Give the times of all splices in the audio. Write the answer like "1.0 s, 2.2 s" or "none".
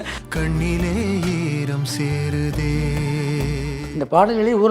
none